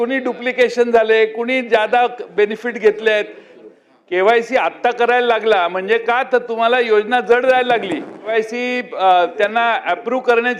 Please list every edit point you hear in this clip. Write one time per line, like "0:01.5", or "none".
0:03.5
0:08.3